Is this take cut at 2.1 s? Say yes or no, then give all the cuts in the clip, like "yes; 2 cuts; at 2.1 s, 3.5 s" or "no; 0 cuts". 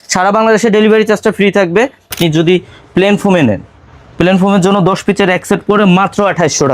yes; 1 cut; at 2.1 s